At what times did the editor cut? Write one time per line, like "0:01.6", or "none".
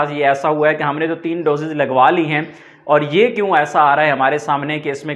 none

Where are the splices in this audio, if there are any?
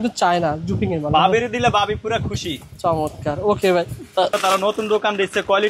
0:04.4

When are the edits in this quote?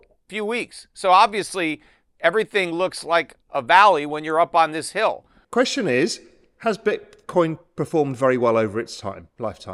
none

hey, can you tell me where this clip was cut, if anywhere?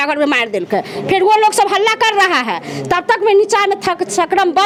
none

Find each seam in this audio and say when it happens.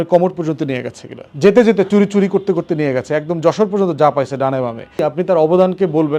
0:05.0

